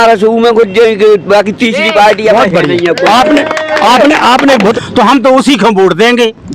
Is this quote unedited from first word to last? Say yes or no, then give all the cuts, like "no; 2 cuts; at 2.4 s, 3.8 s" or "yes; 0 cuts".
no; 1 cut; at 4.8 s